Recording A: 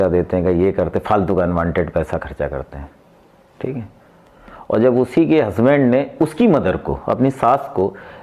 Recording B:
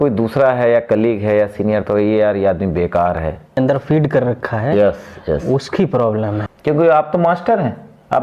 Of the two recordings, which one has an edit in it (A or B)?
B